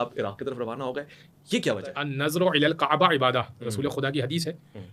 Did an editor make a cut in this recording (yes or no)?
yes